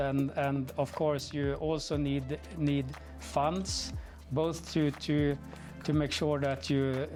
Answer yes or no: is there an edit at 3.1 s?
no